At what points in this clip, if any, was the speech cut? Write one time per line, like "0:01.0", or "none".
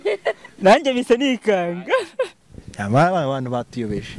none